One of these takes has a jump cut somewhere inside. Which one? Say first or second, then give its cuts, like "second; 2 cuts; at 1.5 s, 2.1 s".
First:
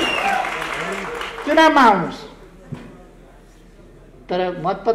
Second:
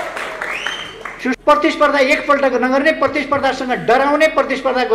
second; 1 cut; at 1.4 s